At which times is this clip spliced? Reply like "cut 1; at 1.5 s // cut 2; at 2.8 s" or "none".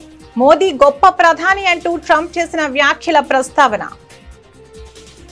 cut 1; at 4.0 s